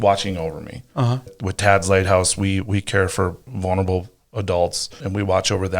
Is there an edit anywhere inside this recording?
yes; 3 cuts; at 1.3 s, 3.5 s, 5.0 s

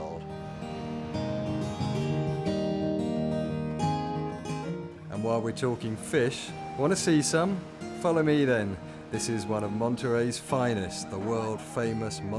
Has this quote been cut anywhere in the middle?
no; 0 cuts

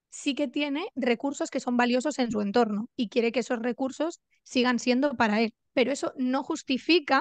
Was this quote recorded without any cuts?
no; 2 cuts; at 0.9 s, 5.6 s

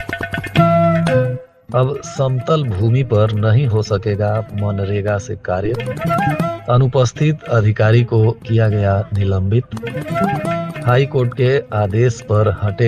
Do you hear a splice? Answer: yes; 1 cut; at 1.5 s

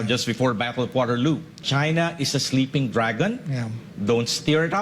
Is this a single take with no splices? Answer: no; 1 cut; at 1.6 s

